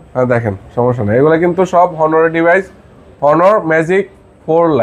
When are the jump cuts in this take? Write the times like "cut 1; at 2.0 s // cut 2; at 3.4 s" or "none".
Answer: none